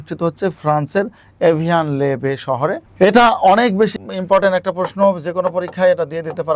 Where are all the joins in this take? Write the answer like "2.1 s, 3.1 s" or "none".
2.8 s, 3.9 s